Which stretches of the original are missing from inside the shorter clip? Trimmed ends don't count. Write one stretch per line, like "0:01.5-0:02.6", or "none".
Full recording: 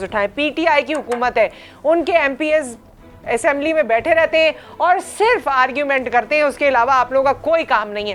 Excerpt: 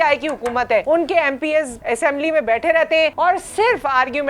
0:01.5-0:01.8
0:02.7-0:03.2
0:04.6-0:04.8